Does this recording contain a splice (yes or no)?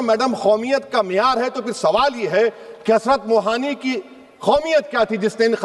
no